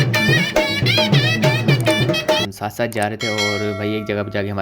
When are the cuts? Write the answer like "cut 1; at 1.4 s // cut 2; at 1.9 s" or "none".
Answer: cut 1; at 2.5 s